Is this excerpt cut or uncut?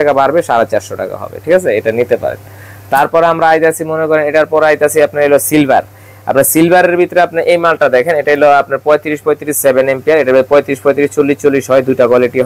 uncut